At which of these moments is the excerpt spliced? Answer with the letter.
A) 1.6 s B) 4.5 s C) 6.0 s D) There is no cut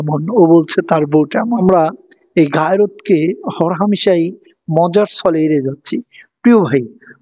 A